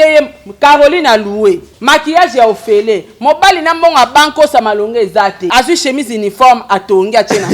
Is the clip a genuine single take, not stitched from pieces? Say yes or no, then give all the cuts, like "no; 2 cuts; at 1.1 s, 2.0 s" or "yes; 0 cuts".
no; 2 cuts; at 1.7 s, 5.4 s